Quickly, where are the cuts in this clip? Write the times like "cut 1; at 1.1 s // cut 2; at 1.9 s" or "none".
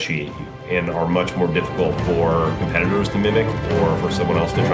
none